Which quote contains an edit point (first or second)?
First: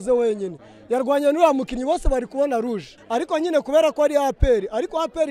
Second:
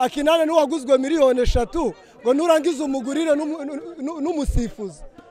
first